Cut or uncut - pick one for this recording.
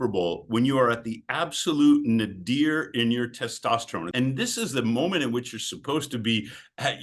cut